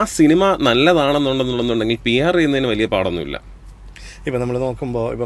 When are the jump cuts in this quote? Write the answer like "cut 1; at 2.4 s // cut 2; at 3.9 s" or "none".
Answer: none